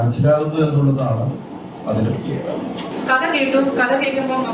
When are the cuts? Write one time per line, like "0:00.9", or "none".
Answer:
0:02.9